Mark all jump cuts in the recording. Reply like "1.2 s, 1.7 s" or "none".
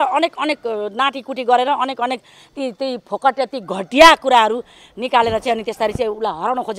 none